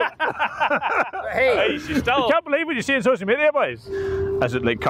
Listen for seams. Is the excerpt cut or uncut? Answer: cut